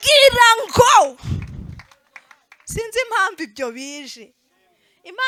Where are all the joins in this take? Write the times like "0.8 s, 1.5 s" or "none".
none